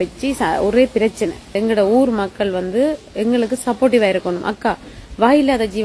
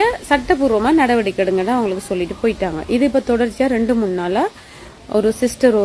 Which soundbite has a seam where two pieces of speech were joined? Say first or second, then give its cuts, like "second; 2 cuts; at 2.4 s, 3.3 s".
first; 1 cut; at 1.4 s